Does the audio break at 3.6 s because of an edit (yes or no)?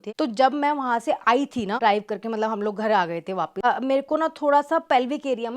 yes